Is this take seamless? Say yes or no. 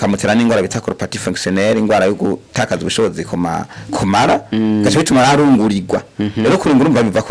yes